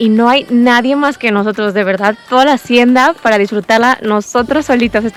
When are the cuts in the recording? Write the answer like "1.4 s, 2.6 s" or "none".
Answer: none